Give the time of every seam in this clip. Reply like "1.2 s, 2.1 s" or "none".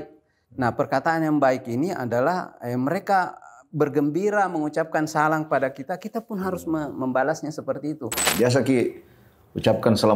8.2 s